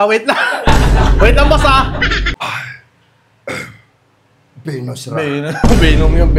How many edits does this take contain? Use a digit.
1